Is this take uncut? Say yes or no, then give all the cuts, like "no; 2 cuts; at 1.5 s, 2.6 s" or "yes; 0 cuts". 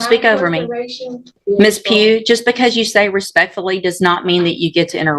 no; 1 cut; at 1.3 s